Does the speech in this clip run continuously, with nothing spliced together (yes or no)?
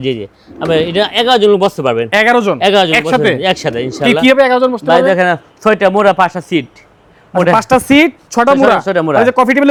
yes